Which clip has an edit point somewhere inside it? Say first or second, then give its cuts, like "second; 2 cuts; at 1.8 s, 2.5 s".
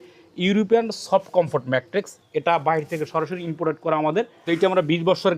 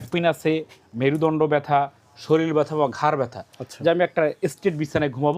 first; 1 cut; at 4.4 s